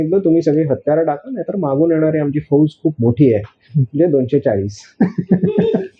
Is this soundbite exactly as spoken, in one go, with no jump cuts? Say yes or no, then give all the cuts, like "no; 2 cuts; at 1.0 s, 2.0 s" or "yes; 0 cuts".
yes; 0 cuts